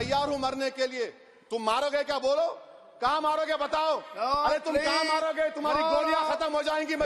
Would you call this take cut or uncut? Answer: uncut